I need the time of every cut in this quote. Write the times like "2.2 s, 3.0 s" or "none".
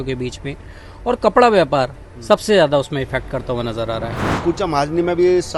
4.4 s